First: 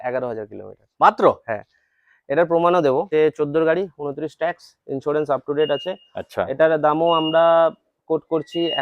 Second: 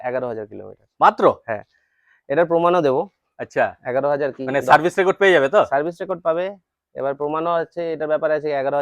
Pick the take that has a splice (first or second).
first